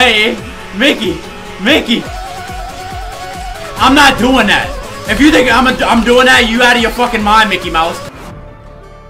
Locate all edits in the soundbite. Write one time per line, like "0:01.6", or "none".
0:02.0
0:08.1